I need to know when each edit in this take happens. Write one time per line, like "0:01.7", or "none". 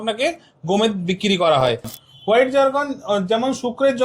0:01.9